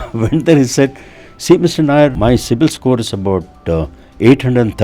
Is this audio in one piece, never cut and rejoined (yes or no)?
no